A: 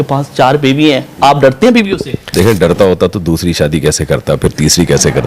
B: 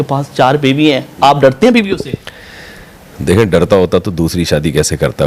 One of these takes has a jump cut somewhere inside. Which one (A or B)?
A